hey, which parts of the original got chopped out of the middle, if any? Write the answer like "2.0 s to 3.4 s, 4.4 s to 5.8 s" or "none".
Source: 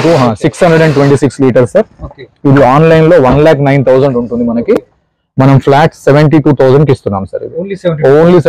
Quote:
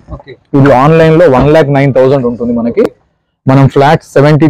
none

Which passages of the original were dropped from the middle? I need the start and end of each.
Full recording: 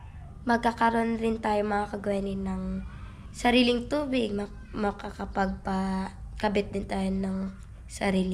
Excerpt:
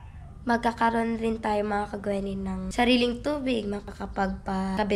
2.7 s to 3.3 s, 4.8 s to 5.8 s

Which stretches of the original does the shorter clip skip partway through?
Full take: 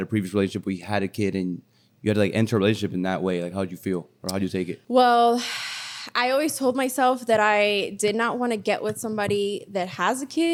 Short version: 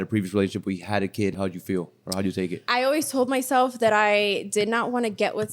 1.3 s to 3.5 s, 4.7 s to 6.0 s

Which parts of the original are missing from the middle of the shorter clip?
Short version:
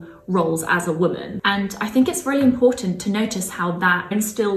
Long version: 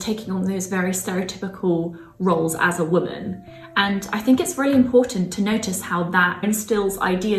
3.2 s to 3.6 s

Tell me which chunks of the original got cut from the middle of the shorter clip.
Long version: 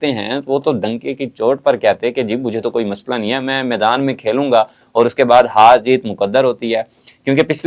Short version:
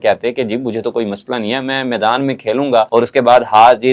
4.7 s to 4.9 s

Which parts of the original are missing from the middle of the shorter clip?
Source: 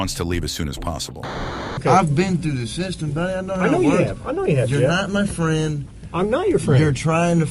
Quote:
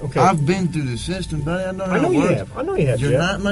none

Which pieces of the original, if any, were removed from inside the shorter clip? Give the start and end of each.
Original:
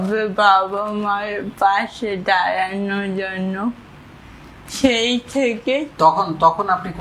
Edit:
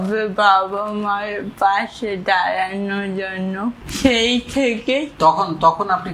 3.9 s to 4.7 s

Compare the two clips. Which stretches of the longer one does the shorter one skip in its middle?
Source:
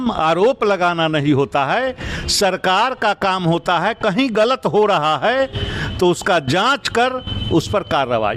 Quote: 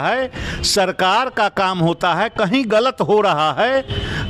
none

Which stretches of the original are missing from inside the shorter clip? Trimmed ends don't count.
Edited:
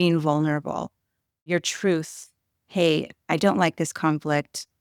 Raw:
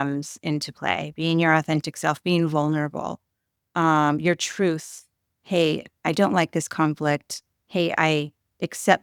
3.7 s to 4.2 s

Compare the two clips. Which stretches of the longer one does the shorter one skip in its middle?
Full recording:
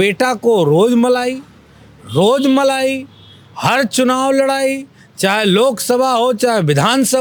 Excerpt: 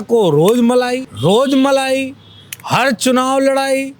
1.4 s to 2.0 s

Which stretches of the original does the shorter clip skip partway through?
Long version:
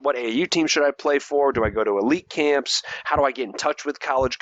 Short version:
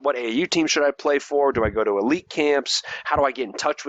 none

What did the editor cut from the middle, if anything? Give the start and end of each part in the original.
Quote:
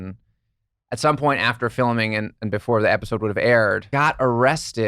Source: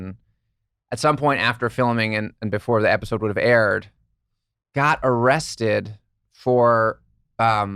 3.8 s to 4.7 s

